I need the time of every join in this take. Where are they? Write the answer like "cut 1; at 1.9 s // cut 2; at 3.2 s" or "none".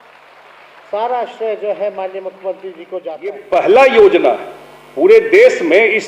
cut 1; at 3.4 s